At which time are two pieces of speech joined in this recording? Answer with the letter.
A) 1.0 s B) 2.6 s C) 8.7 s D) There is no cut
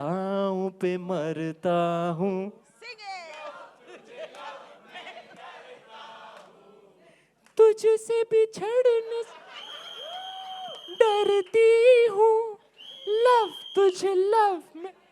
D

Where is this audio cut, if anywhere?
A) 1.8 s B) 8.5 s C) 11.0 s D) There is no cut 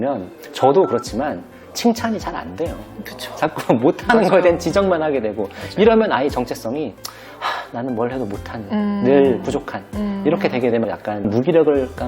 C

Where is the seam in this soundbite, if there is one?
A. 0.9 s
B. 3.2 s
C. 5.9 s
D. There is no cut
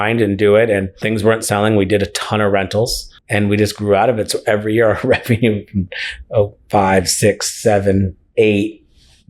A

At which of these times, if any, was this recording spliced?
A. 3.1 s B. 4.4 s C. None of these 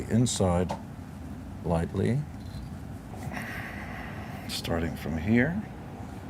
A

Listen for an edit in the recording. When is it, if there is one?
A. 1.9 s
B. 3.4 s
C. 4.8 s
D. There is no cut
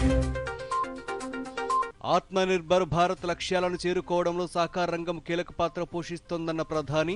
A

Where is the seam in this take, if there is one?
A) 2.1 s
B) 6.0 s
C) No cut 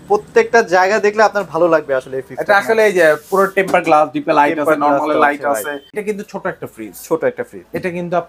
B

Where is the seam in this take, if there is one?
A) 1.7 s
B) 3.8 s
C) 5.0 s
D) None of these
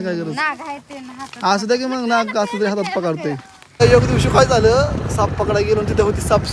B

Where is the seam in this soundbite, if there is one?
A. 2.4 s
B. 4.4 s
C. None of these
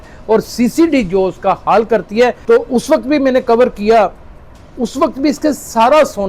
A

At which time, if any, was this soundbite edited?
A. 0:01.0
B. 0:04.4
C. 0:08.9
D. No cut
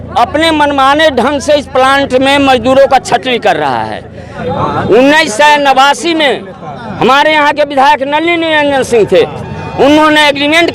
B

